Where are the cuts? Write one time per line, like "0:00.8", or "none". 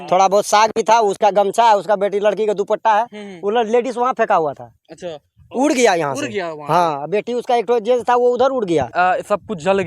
0:08.9